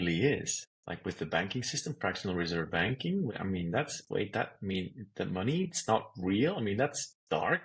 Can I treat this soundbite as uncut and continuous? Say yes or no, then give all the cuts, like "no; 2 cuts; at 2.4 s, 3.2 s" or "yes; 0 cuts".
no; 2 cuts; at 1.2 s, 3.4 s